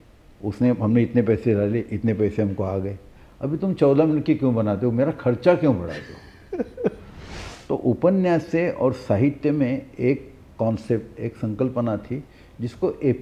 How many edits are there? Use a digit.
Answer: 1